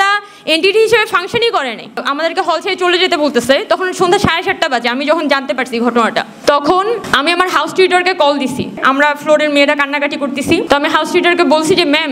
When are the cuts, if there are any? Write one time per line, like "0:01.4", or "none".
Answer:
0:02.1
0:06.3
0:07.0
0:08.8
0:10.6